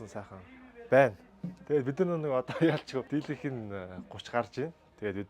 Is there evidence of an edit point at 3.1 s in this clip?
yes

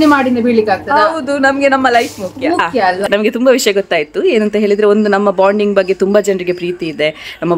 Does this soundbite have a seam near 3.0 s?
yes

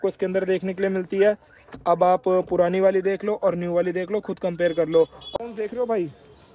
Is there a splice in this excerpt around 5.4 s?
yes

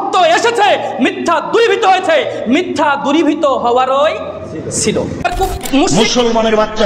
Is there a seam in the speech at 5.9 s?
yes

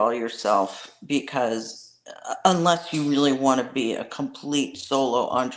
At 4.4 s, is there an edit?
no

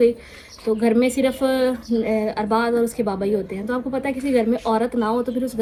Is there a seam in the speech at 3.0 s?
no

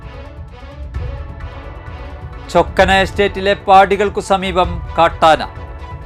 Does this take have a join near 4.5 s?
no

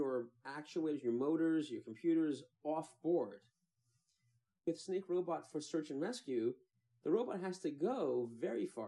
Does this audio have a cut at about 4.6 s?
yes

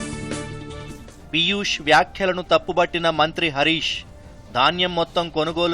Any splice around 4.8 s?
no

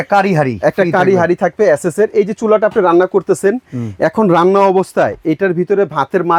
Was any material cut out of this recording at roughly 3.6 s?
no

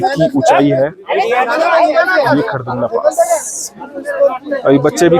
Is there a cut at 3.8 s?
no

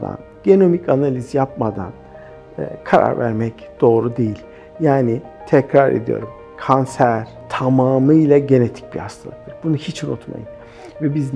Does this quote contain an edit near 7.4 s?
yes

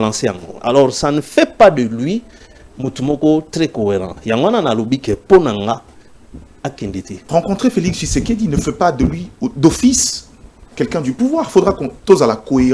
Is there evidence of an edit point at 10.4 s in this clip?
no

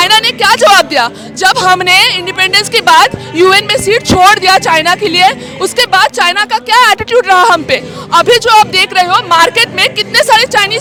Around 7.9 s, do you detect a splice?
no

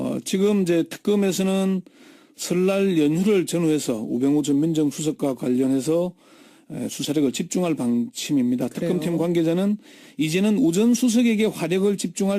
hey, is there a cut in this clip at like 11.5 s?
no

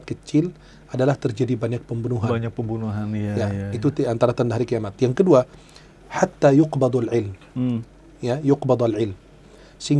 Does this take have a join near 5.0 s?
no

